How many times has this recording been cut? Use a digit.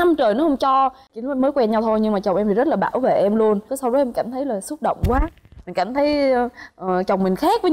1